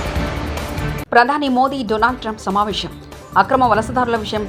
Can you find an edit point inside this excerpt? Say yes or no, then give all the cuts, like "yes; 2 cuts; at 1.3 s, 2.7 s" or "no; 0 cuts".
no; 0 cuts